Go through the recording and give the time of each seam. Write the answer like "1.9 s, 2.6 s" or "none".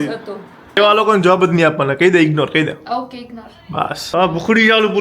0.8 s, 4.0 s